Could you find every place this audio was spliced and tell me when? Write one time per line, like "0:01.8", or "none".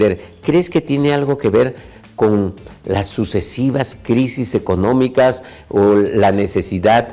none